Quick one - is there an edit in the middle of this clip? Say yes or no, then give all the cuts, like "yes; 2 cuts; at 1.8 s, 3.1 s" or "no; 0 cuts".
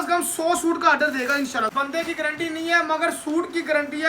yes; 1 cut; at 1.7 s